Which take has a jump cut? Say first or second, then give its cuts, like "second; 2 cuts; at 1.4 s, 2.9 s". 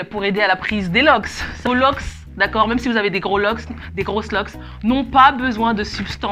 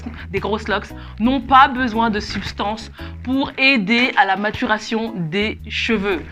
first; 1 cut; at 1.5 s